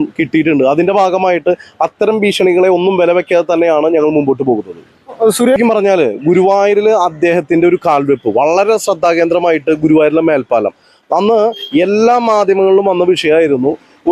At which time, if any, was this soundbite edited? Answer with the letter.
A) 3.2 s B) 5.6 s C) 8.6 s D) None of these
B